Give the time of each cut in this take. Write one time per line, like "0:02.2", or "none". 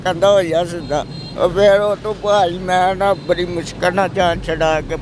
0:01.2